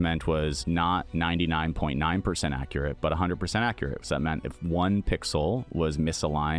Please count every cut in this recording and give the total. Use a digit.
2